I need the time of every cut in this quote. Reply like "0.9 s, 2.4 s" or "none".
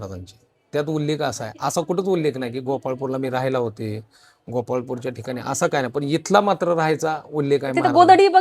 none